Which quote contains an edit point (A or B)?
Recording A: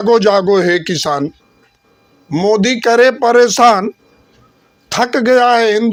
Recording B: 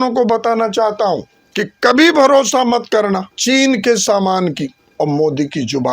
B